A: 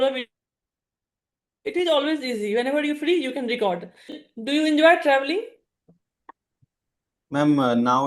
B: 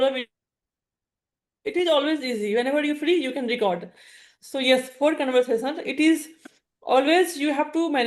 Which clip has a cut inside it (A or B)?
A